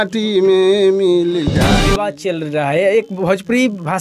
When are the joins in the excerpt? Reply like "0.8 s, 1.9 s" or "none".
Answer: 1.9 s